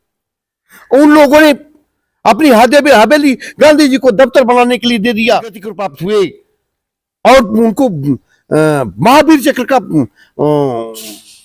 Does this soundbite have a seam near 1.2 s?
no; 1 cut; at 5.7 s

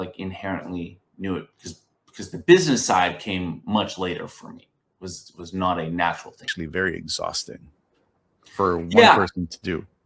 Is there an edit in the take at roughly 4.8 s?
no; 1 cut; at 6.6 s

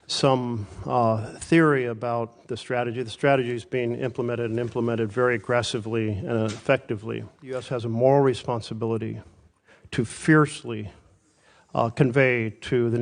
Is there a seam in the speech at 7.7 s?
yes; 1 cut; at 7.7 s

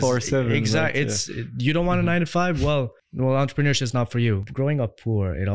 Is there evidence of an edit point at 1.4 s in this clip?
no; 2 cuts; at 3.0 s, 4.5 s

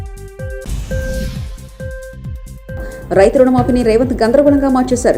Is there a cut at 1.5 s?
no; 1 cut; at 2.8 s

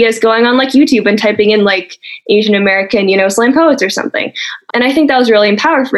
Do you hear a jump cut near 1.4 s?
no; 1 cut; at 4.6 s

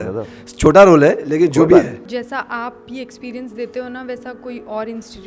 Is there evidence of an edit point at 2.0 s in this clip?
yes; 1 cut; at 2.0 s

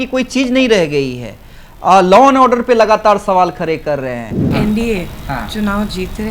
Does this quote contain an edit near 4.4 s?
yes; 1 cut; at 4.4 s

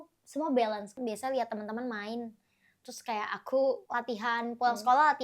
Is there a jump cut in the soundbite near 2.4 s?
no; 2 cuts; at 1.0 s, 3.8 s

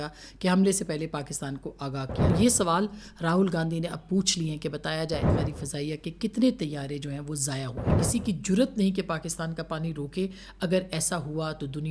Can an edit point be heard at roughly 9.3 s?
no; 3 cuts; at 2.3 s, 5.3 s, 7.9 s

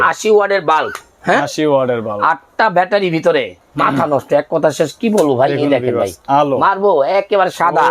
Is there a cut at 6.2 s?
no; 1 cut; at 3.6 s

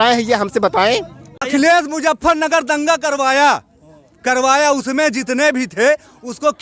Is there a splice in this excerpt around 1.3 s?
yes; 1 cut; at 1.3 s

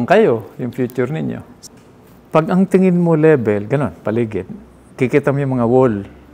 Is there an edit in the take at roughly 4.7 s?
no; 1 cut; at 1.5 s

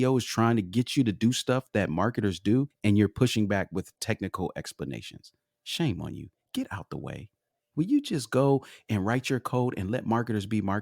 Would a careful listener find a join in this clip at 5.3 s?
no; 1 cut; at 2.7 s

